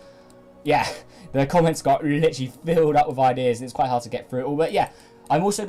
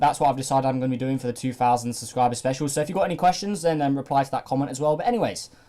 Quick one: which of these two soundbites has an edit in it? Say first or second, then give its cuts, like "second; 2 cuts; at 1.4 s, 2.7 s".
second; 1 cut; at 1.0 s